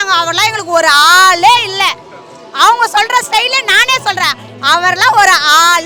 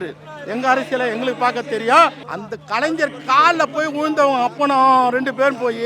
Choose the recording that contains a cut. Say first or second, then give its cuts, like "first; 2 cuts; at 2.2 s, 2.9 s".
second; 1 cut; at 2.3 s